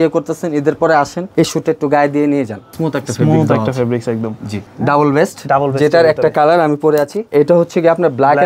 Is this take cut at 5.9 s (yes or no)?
no